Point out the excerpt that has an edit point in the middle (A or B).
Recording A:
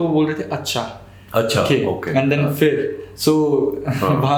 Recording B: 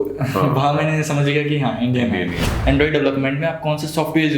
B